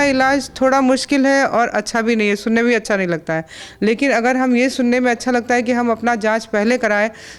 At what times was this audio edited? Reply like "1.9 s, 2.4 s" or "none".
none